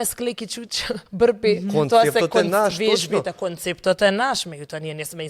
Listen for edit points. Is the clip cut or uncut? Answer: cut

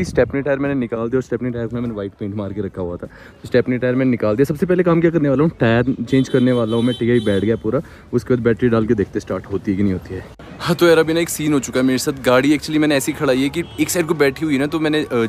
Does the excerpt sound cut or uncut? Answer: uncut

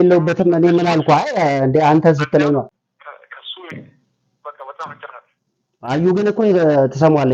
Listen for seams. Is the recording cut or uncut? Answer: cut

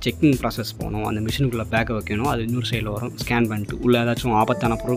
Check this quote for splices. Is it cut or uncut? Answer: uncut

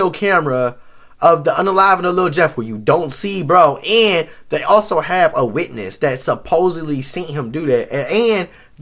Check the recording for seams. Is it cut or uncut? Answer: uncut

